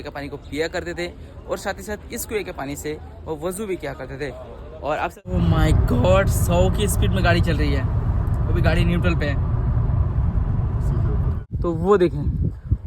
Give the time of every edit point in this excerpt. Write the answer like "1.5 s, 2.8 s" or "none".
5.2 s, 11.4 s